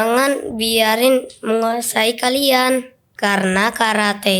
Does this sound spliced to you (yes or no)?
no